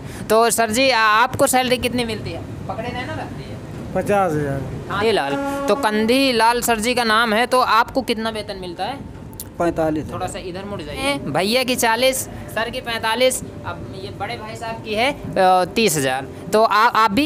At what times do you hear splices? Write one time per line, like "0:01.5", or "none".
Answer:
0:03.3
0:05.0
0:11.0